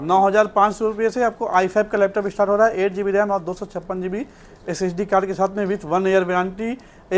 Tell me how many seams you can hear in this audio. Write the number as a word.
zero